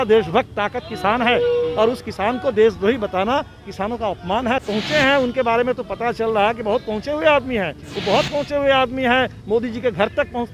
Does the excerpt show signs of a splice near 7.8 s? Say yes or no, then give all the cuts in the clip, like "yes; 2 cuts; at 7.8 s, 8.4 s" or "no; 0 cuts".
yes; 2 cuts; at 4.6 s, 7.8 s